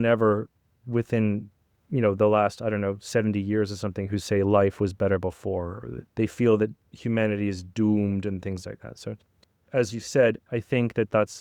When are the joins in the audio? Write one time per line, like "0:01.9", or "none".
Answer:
0:06.0